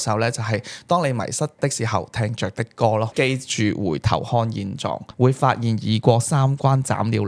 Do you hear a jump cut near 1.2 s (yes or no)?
no